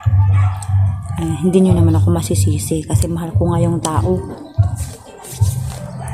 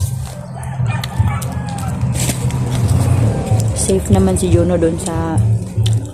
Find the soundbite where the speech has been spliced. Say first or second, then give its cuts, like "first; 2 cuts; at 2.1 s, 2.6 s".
second; 1 cut; at 3.2 s